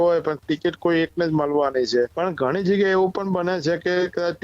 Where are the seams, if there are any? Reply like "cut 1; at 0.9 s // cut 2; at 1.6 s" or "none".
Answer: cut 1; at 2.1 s